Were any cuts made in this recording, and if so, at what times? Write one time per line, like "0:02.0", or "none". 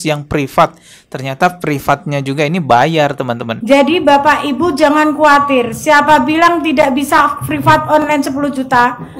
0:03.5